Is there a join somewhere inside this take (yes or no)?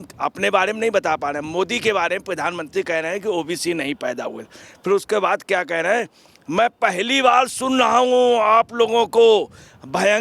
no